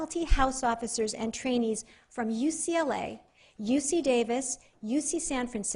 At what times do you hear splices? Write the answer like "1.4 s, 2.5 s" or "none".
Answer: 1.9 s